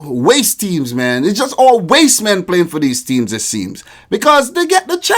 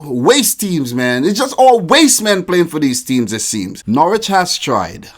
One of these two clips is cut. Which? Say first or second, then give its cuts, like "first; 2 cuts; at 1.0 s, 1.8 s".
second; 1 cut; at 3.7 s